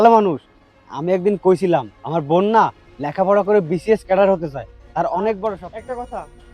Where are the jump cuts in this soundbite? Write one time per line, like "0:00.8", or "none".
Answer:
0:05.6